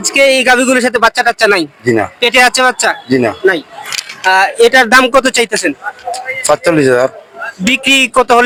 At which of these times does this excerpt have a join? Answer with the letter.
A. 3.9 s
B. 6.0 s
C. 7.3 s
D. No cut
D